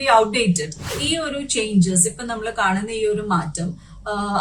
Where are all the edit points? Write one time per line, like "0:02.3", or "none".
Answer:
0:01.0